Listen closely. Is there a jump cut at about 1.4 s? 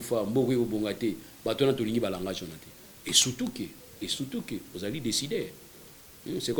no; 0 cuts

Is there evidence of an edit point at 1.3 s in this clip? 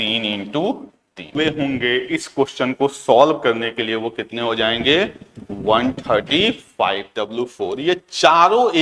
yes; 2 cuts; at 1.3 s, 7.1 s

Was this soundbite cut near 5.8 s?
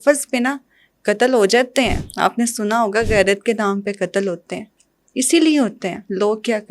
no; 1 cut; at 2.0 s

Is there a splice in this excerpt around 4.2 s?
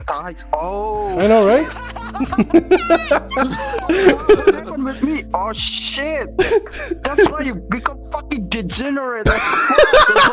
no; 0 cuts

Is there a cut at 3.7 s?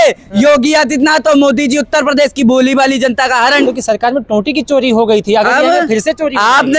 yes; 1 cut; at 3.7 s

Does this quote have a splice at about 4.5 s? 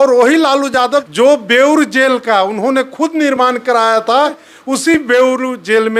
yes; 2 cuts; at 1.1 s, 4.5 s

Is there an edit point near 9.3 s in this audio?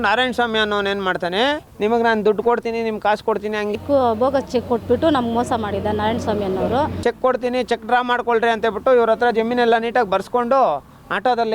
no; 3 cuts; at 1.7 s, 3.8 s, 7.0 s

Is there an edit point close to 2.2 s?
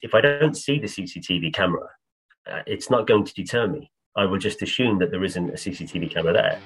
no; 0 cuts

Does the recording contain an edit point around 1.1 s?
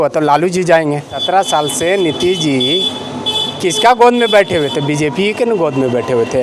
yes; 1 cut; at 1.1 s

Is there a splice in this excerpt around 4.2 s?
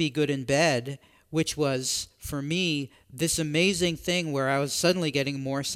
no; 0 cuts

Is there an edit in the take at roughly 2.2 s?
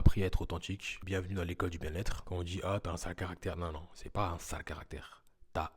yes; 2 cuts; at 0.9 s, 2.2 s

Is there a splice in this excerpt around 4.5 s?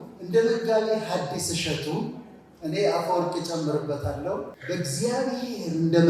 yes; 1 cut; at 4.5 s

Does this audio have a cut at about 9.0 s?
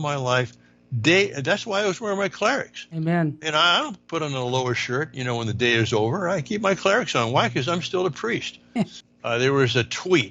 yes; 1 cut; at 9.0 s

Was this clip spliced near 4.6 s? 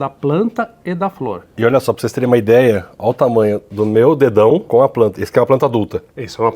yes; 2 cuts; at 1.5 s, 4.6 s

